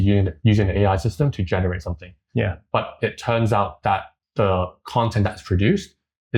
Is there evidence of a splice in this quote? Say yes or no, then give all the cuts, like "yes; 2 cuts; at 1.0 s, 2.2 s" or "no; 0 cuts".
no; 0 cuts